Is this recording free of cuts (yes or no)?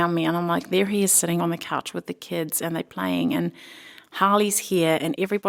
yes